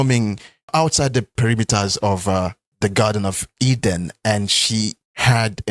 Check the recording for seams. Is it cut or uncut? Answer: cut